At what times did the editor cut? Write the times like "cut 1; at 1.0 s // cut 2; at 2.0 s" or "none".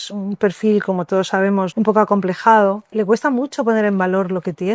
cut 1; at 1.7 s // cut 2; at 2.9 s